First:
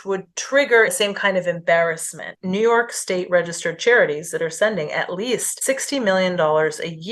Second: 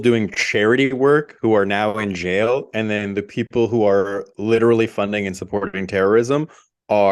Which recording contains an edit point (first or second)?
first